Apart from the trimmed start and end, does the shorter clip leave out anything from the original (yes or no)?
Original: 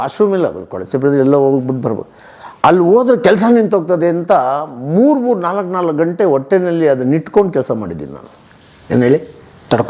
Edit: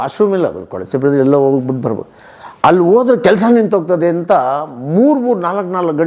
no